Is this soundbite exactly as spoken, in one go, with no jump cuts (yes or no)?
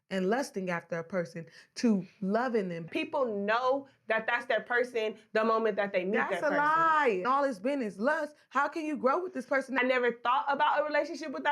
no